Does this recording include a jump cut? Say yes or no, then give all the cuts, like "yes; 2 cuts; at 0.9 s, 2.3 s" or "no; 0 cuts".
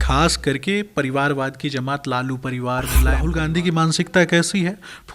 yes; 1 cut; at 3.2 s